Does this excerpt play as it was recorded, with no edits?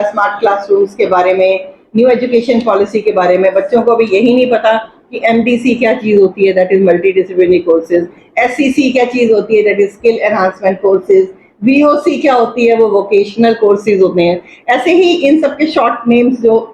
yes; 0 cuts

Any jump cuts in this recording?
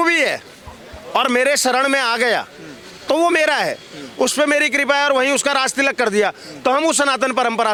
no; 0 cuts

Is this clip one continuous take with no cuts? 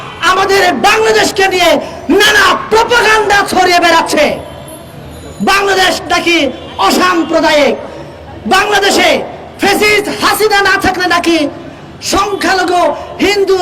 yes; 0 cuts

